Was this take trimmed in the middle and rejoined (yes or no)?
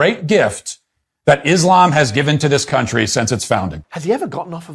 yes